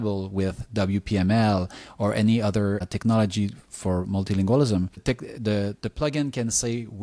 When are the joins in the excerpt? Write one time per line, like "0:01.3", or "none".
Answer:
none